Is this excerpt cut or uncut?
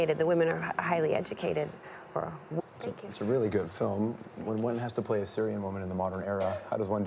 uncut